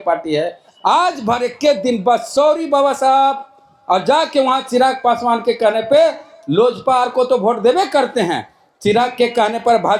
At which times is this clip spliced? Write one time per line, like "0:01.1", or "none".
none